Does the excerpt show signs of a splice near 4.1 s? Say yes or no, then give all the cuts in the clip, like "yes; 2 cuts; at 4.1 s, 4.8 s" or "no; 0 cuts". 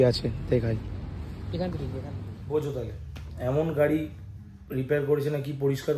no; 1 cut; at 2.3 s